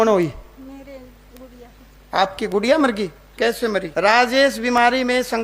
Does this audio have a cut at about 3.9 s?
yes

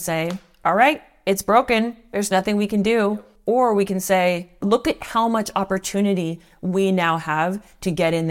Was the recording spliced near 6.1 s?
no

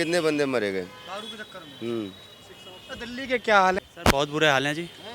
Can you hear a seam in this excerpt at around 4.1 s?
yes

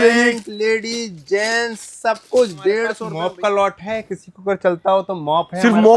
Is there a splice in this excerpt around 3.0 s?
yes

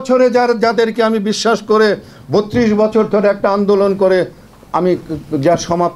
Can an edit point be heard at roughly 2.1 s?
no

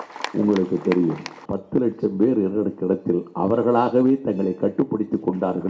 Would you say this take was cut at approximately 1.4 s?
yes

